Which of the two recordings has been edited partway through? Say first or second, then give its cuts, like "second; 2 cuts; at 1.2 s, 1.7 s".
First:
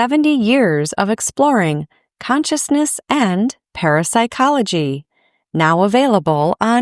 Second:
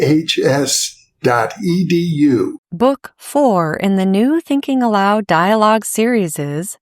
second; 1 cut; at 2.6 s